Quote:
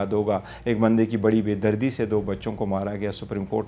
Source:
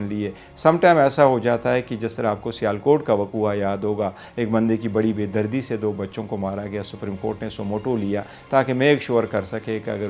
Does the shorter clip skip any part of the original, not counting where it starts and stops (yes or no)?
no